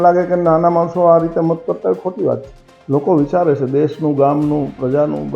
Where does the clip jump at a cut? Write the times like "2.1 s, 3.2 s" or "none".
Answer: none